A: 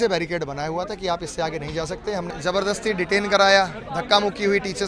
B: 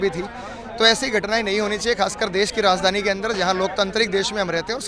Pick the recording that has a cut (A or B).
A